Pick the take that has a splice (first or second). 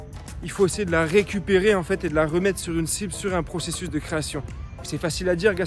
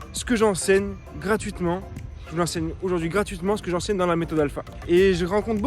second